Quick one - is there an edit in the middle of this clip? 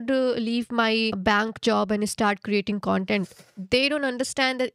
yes; 1 cut; at 1.2 s

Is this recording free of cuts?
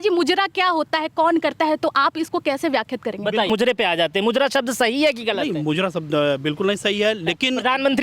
no; 1 cut; at 3.5 s

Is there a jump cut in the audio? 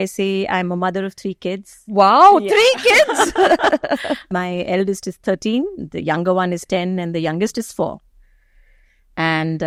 no; 0 cuts

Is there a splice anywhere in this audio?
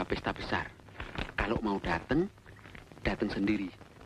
no; 0 cuts

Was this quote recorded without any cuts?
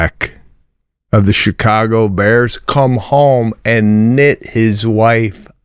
yes; 0 cuts

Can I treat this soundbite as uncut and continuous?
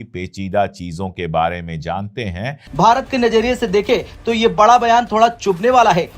no; 1 cut; at 2.6 s

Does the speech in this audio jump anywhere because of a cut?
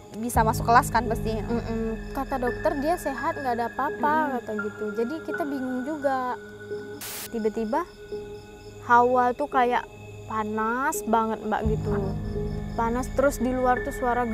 yes; 2 cuts; at 2.0 s, 6.9 s

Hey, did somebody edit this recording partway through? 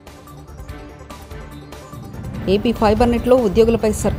no; 0 cuts

